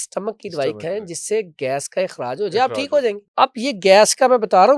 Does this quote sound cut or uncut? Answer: cut